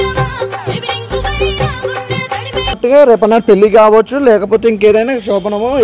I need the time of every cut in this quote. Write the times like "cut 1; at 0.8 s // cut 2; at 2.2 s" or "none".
cut 1; at 2.8 s